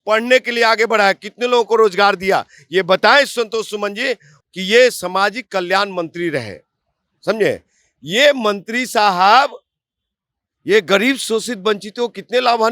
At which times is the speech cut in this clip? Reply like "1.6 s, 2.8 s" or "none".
4.3 s